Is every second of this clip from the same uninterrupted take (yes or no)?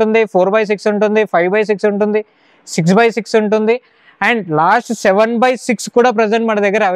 yes